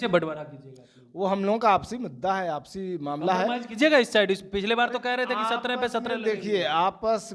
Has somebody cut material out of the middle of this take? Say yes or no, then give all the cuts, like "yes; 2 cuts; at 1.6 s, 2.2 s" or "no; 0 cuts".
no; 0 cuts